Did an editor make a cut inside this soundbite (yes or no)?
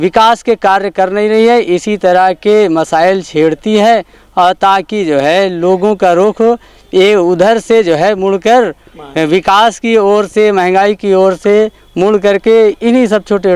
no